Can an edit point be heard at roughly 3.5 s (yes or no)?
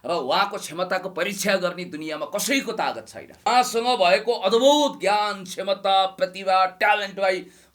yes